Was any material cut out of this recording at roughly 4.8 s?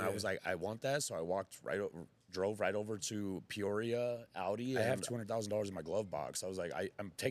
yes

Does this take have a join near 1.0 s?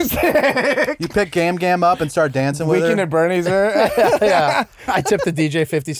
no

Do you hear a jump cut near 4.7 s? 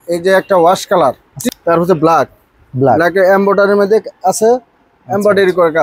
no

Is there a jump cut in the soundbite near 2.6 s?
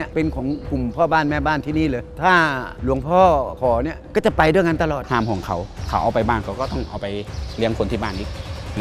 no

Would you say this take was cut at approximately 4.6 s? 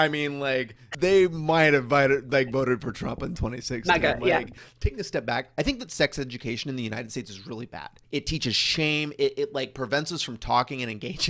yes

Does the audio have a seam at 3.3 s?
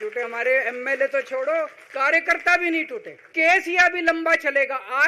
yes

